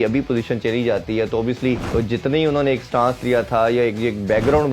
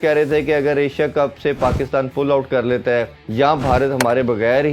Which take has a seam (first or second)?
first